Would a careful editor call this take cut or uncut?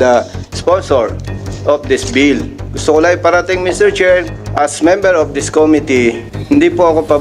cut